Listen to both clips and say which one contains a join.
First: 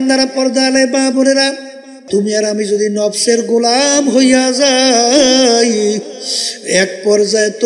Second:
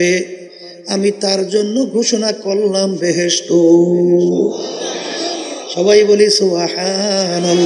first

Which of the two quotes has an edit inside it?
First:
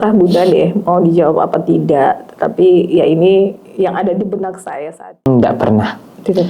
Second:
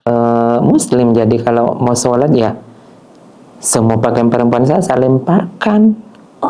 first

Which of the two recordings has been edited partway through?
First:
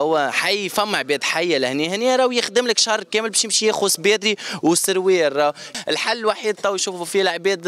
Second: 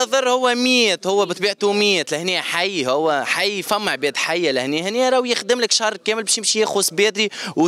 first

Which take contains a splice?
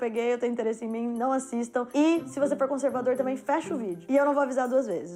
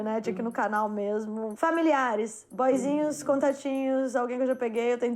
second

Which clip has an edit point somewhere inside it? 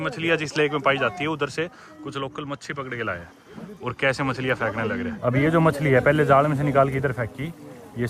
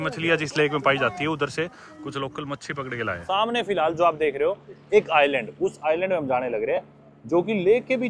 second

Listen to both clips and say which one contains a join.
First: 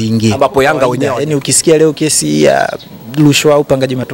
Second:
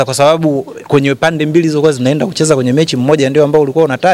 first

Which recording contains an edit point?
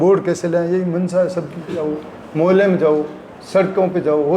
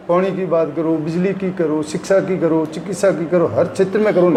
first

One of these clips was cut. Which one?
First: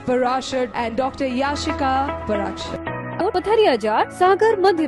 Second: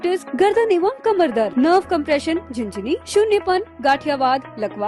first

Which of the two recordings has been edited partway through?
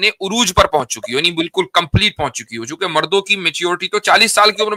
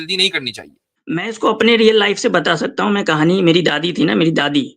second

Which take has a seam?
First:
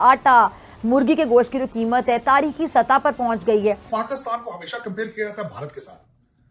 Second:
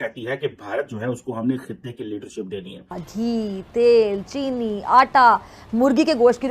second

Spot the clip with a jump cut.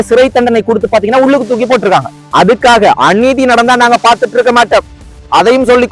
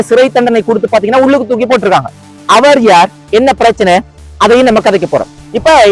first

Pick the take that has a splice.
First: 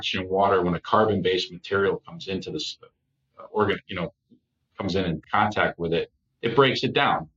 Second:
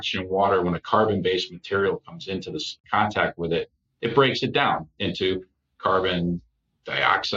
second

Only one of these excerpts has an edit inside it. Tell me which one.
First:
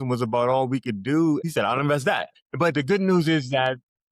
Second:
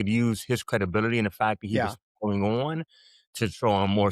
first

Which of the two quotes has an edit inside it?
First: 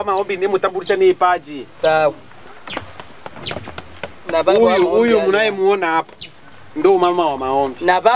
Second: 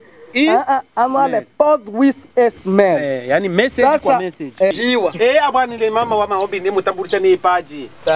second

